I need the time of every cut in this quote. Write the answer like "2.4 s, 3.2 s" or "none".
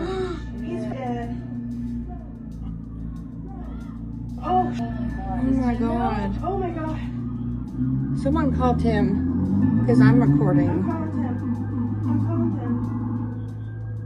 0.9 s, 4.8 s